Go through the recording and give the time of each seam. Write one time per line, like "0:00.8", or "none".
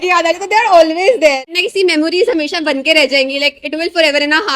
0:01.5